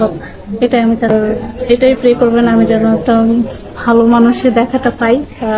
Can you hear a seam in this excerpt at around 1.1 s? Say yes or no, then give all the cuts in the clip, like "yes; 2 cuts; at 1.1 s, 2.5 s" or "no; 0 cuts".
yes; 1 cut; at 1.1 s